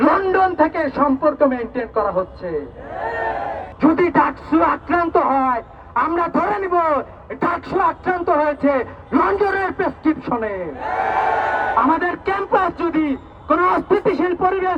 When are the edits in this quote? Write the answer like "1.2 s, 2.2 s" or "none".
3.6 s